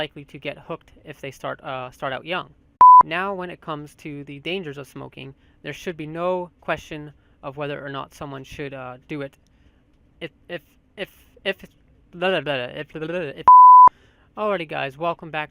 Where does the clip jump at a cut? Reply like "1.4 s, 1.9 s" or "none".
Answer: none